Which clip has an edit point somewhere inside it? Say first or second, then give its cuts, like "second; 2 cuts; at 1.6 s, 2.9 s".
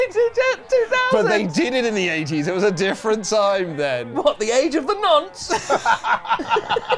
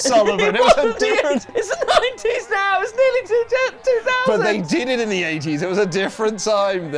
second; 1 cut; at 1.5 s